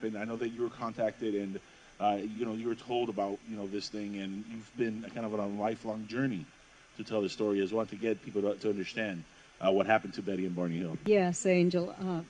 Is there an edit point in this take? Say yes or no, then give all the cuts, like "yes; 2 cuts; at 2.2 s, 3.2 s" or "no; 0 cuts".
no; 0 cuts